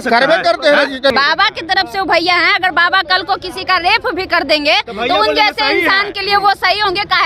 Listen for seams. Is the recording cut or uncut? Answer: cut